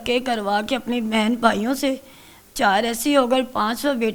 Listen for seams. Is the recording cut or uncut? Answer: uncut